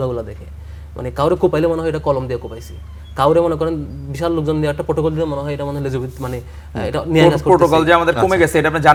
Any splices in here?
no; 0 cuts

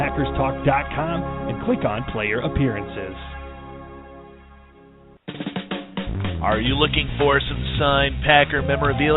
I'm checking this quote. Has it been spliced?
yes; 1 cut; at 5.1 s

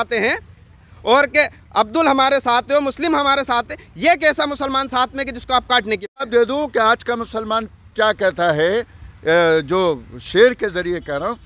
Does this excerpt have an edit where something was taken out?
yes; 1 cut; at 6.3 s

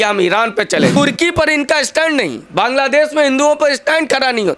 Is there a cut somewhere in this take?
yes; 1 cut; at 0.9 s

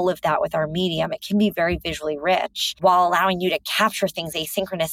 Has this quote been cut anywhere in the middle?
yes; 1 cut; at 2.6 s

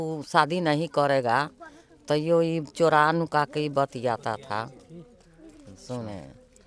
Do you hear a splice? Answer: no; 0 cuts

